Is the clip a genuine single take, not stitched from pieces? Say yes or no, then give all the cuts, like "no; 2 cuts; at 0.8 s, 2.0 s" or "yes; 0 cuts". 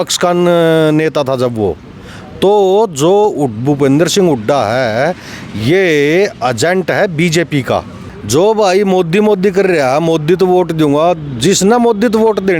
no; 1 cut; at 8.4 s